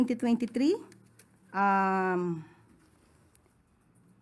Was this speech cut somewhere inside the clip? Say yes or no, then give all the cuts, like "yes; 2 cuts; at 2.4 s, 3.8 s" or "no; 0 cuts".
no; 0 cuts